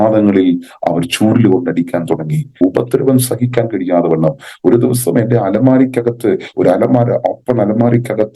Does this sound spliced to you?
yes; 1 cut; at 2.5 s

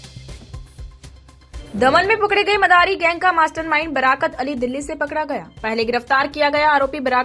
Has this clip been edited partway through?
yes; 1 cut; at 1.6 s

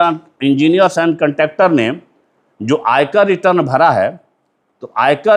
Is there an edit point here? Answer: no; 0 cuts

